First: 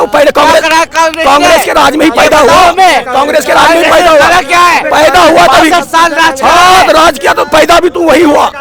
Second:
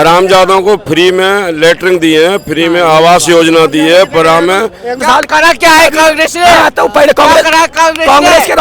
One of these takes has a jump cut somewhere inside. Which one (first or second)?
second